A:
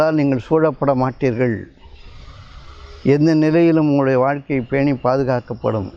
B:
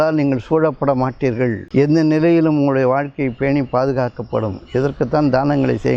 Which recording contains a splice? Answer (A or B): B